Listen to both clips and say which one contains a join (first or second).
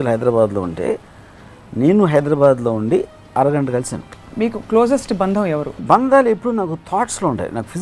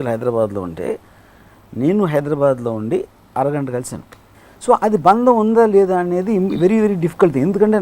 first